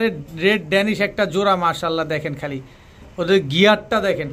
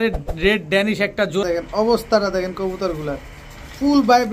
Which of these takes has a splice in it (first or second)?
second